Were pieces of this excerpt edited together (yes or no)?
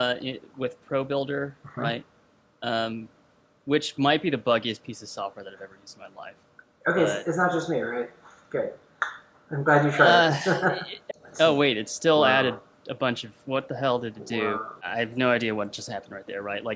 yes